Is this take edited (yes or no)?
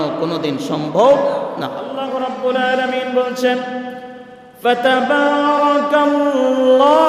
yes